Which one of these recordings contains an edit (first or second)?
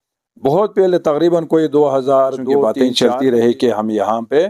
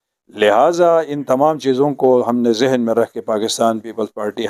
first